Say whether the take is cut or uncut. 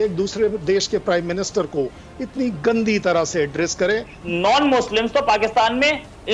cut